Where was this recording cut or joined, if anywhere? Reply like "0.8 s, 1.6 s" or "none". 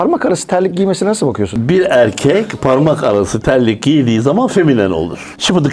1.6 s